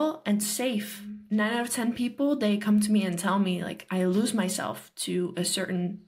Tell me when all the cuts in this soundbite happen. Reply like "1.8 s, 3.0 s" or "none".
1.2 s